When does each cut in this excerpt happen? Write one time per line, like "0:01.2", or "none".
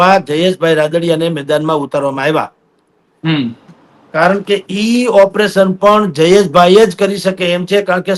none